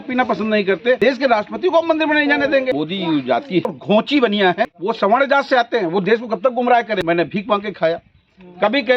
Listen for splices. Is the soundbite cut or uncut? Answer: cut